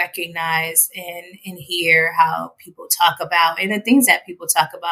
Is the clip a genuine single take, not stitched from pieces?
yes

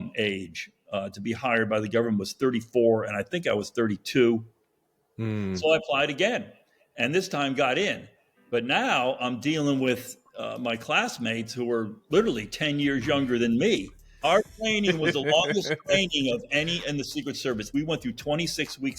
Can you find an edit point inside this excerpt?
yes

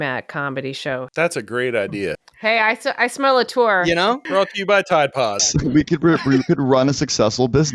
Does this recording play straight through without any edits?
no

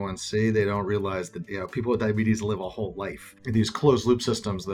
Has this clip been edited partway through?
yes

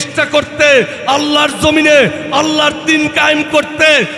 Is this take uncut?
yes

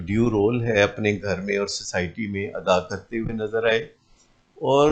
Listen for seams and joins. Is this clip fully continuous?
yes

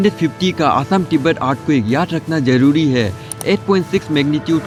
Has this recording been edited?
no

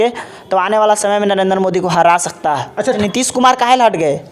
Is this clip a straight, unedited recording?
no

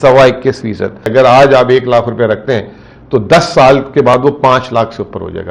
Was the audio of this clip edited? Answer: yes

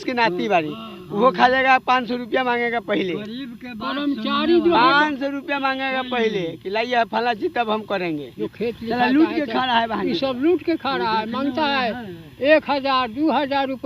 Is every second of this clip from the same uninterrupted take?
no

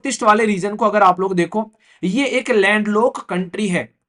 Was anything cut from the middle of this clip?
no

